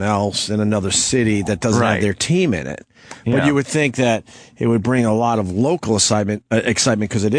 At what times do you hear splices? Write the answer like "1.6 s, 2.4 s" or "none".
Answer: 4.4 s